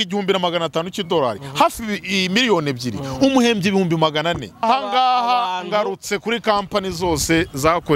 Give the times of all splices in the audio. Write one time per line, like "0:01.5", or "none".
0:04.6